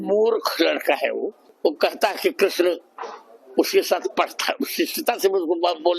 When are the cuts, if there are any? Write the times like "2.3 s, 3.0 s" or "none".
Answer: 1.4 s